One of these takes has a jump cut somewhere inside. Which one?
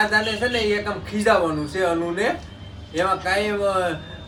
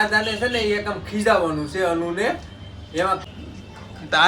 second; 1 cut; at 3.2 s

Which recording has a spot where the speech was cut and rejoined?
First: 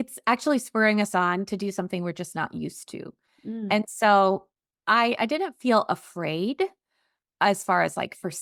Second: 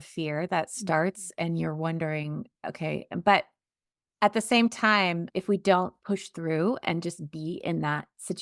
second; 1 cut; at 5.3 s

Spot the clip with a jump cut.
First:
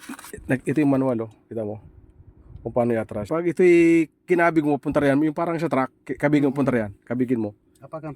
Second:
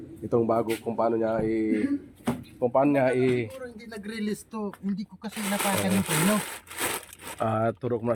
first; 1 cut; at 3.2 s

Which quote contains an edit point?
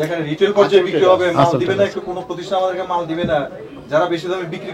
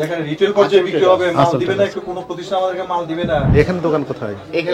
second; 1 cut; at 3.5 s

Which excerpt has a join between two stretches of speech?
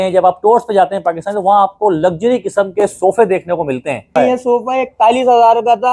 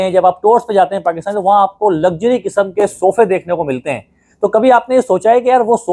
first; 1 cut; at 4.2 s

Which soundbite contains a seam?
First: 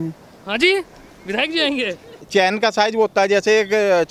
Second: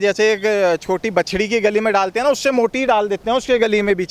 first; 1 cut; at 2.1 s

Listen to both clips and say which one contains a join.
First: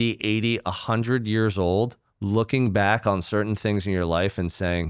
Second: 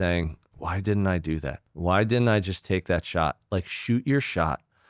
second; 1 cut; at 1.6 s

